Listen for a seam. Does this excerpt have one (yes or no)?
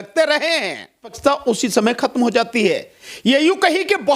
yes